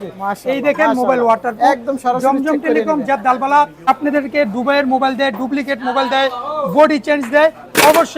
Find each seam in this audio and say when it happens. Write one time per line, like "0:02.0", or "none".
0:03.9